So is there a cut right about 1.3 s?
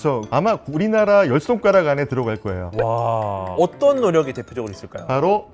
no; 1 cut; at 3.5 s

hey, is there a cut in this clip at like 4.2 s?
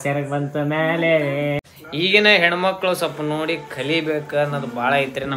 no; 1 cut; at 1.6 s

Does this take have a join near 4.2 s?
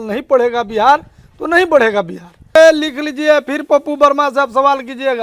no; 1 cut; at 2.6 s

